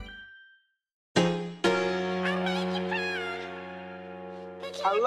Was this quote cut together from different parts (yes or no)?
yes